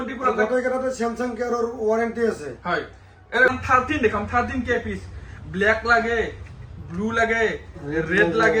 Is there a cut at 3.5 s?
yes; 1 cut; at 3.5 s

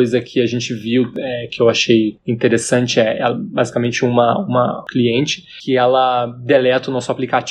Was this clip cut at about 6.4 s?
no; 0 cuts

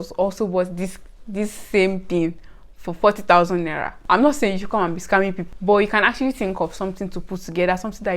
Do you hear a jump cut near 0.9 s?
no; 2 cuts; at 4.0 s, 5.5 s

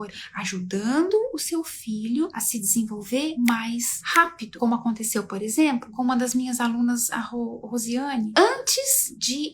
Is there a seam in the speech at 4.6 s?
yes; 2 cuts; at 4.6 s, 8.3 s

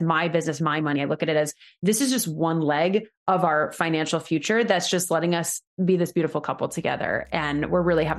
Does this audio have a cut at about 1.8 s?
no; 0 cuts

